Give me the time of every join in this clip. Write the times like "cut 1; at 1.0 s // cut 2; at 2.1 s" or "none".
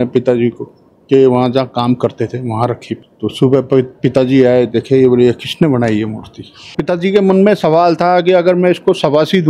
cut 1; at 3.1 s // cut 2; at 6.8 s